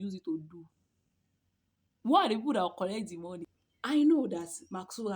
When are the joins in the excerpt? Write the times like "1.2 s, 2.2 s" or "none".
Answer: 3.4 s